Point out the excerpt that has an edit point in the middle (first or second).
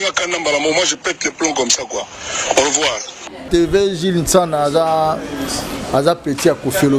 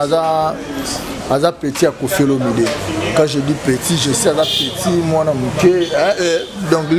first